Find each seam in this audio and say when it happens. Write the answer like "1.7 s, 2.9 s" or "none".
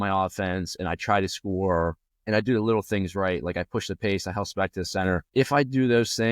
2.1 s, 5.3 s